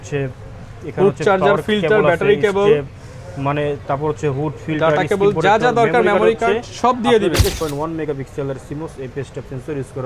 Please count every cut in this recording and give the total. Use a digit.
1